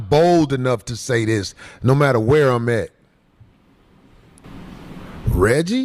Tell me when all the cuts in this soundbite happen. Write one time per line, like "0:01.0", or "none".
none